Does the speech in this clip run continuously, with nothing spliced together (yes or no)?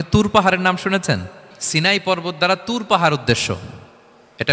no